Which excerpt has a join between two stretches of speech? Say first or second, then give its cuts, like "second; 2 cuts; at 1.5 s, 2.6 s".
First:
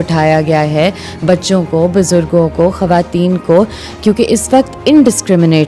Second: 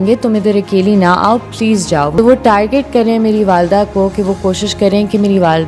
second; 1 cut; at 2.1 s